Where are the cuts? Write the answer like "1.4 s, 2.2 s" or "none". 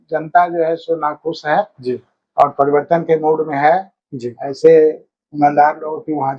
none